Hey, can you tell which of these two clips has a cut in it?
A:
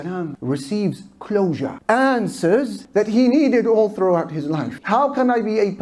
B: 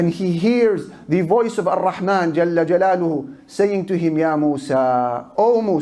A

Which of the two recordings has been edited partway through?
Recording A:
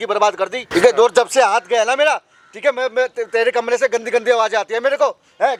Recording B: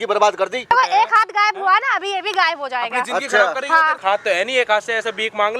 B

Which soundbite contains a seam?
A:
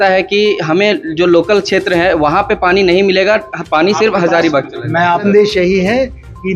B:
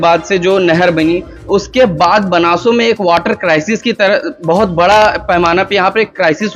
A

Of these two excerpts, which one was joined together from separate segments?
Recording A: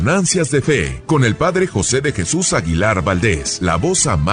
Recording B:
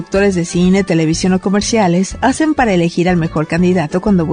A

